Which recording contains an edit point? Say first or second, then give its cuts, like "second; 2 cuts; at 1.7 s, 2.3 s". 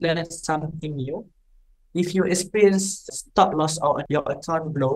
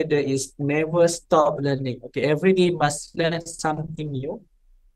first; 2 cuts; at 3.1 s, 4.0 s